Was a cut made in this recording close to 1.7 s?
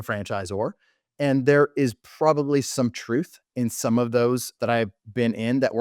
no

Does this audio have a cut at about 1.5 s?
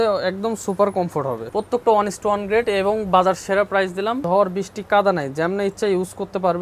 yes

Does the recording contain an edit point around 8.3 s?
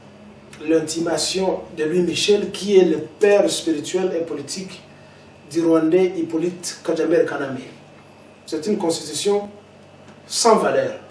yes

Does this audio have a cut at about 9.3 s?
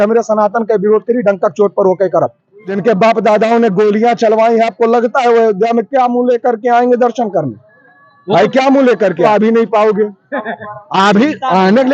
yes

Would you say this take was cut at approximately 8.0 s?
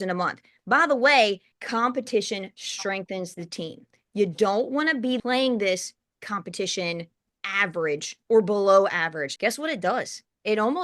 no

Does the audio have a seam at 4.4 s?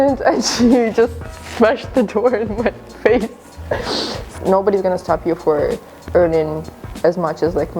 yes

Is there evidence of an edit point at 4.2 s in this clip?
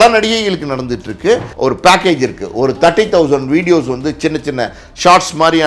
no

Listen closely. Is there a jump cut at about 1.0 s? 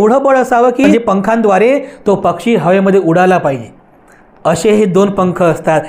yes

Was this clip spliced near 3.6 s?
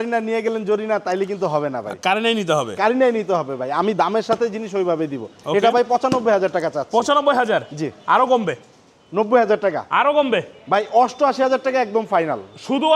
no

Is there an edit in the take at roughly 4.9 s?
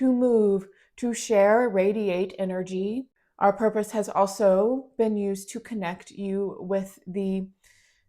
no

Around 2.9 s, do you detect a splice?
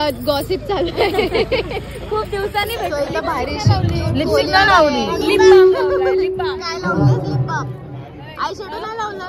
yes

